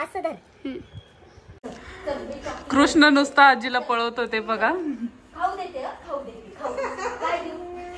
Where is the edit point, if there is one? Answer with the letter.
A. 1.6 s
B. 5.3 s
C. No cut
A